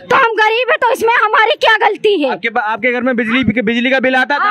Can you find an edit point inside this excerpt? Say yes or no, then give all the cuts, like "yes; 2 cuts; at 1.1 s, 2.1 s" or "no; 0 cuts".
no; 0 cuts